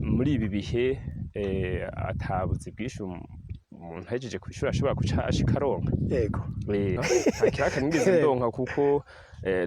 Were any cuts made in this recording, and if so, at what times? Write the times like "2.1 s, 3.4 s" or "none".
7.0 s